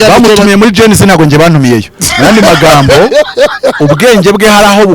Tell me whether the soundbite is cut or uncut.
uncut